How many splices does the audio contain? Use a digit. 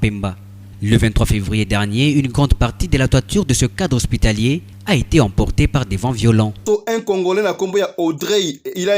1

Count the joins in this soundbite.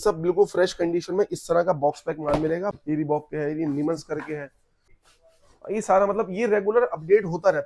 2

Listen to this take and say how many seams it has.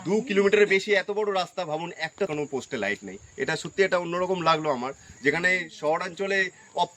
1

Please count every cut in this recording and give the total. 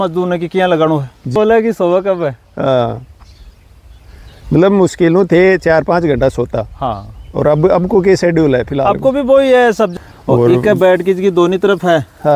2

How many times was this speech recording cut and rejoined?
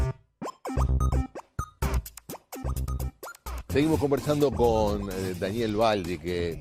0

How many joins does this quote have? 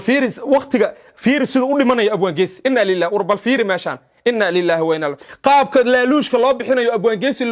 1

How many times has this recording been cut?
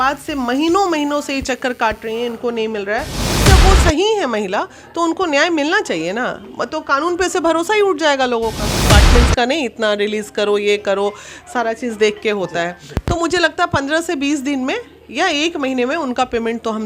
2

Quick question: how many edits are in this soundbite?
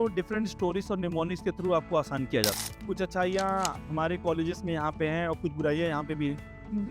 1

